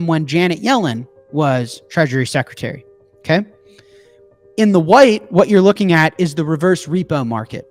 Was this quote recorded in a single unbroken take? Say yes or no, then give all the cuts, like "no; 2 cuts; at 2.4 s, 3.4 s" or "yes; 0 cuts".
yes; 0 cuts